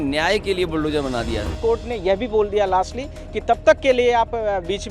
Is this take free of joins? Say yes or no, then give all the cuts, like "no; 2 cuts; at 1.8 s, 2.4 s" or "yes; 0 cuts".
no; 1 cut; at 1.6 s